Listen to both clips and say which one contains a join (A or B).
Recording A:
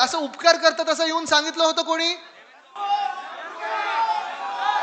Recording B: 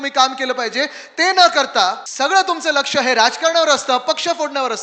B